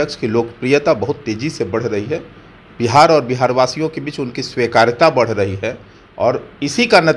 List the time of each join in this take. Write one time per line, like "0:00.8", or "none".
none